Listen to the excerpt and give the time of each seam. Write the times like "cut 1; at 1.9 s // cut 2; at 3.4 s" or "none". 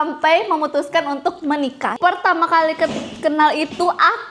cut 1; at 1.9 s